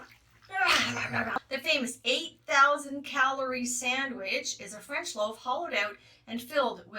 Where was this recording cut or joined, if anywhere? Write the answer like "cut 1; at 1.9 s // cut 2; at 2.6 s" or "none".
cut 1; at 1.5 s